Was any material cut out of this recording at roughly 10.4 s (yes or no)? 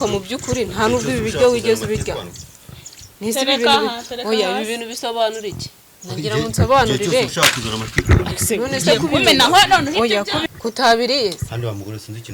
yes